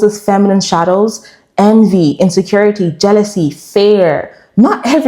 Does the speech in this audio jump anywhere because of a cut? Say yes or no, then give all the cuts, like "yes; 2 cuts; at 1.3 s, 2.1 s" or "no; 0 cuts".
no; 0 cuts